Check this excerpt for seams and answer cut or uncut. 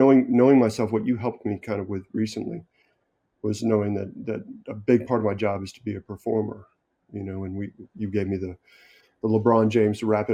uncut